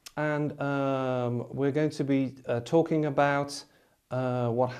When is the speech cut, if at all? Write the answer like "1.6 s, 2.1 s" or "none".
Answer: none